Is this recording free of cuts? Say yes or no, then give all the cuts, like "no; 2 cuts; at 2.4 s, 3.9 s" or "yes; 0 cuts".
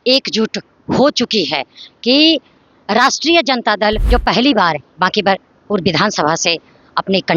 no; 1 cut; at 4.0 s